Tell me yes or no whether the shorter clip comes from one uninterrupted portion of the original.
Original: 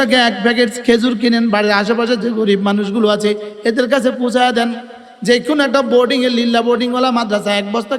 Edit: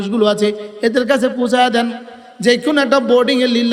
yes